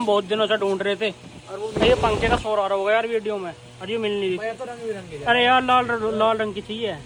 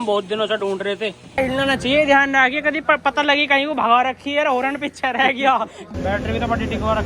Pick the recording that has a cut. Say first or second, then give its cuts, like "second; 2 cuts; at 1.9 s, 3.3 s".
second; 2 cuts; at 1.4 s, 5.9 s